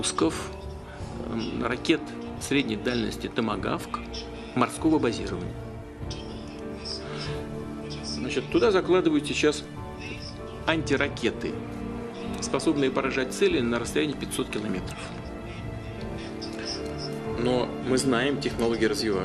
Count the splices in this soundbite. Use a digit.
0